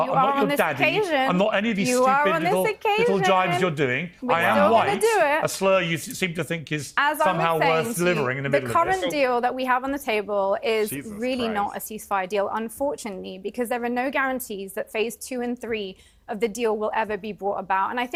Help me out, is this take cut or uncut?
uncut